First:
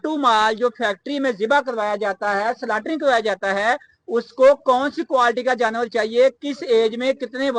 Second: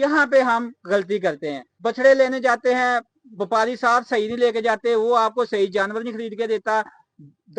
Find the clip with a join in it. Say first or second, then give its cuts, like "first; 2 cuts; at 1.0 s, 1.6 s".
second; 1 cut; at 1.8 s